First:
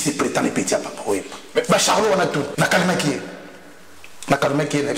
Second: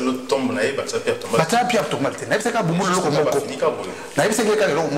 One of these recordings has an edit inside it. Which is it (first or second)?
first